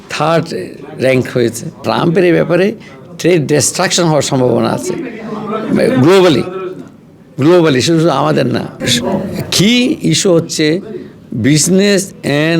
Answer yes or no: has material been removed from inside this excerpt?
yes